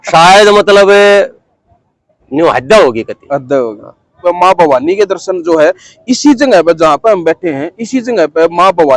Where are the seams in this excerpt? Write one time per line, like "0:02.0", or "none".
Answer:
0:04.2